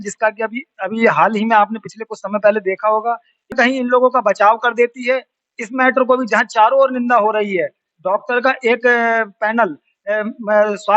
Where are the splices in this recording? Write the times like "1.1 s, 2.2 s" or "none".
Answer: 3.5 s